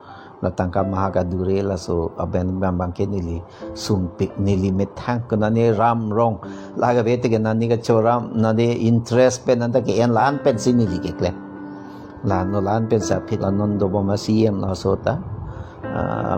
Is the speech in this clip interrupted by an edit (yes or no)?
yes